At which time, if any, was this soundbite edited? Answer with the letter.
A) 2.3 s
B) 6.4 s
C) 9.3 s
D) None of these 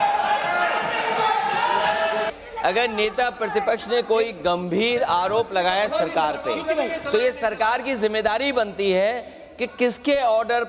A